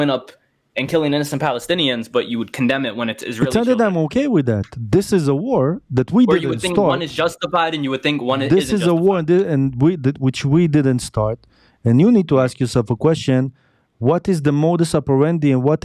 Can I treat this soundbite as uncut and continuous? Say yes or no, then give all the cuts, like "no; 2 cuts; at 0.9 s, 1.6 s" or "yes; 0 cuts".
yes; 0 cuts